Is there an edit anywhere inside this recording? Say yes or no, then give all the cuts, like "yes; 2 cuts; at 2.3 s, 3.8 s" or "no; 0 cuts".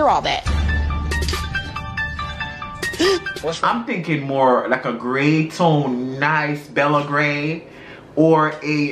yes; 1 cut; at 3.4 s